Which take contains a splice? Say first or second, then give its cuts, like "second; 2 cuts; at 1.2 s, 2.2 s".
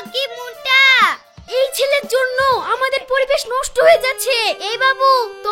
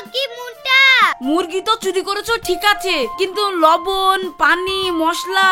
second; 1 cut; at 1.2 s